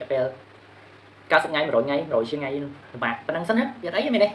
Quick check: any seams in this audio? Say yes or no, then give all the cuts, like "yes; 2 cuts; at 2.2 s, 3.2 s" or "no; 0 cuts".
no; 0 cuts